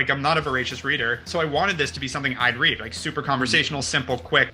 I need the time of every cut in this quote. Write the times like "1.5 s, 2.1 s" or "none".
1.2 s